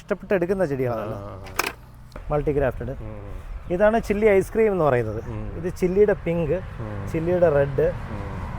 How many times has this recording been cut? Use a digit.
1